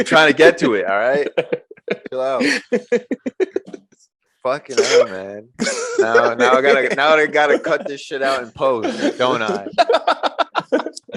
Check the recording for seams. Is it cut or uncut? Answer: uncut